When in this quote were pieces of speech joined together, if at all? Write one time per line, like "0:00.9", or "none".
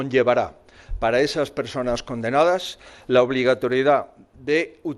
none